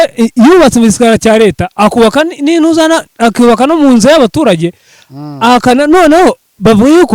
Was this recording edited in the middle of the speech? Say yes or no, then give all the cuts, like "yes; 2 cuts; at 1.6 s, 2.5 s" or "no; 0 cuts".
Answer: no; 0 cuts